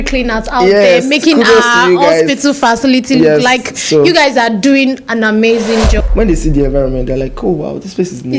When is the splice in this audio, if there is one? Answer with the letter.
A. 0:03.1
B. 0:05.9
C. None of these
B